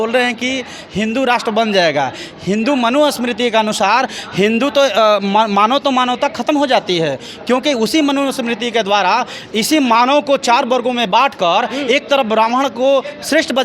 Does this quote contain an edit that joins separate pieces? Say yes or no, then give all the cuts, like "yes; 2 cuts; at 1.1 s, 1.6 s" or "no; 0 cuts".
no; 0 cuts